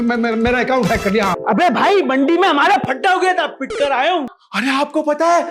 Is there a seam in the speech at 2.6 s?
no; 2 cuts; at 1.4 s, 4.3 s

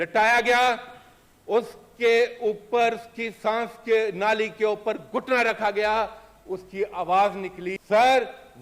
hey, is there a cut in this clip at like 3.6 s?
no; 1 cut; at 7.7 s

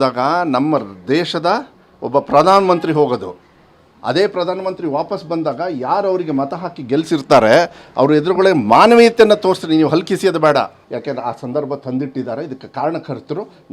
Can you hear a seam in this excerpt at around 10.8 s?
yes; 1 cut; at 10.8 s

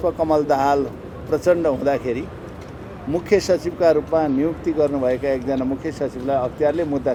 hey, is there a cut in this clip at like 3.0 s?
no; 0 cuts

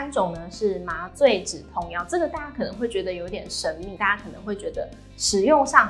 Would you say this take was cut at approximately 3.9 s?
yes; 1 cut; at 3.9 s

